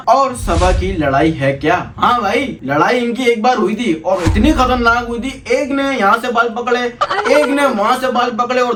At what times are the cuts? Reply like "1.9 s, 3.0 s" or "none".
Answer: none